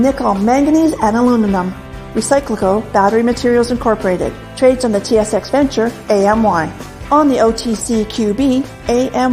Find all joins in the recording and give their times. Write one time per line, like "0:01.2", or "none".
none